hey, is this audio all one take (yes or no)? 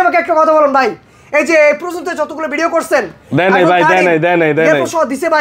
yes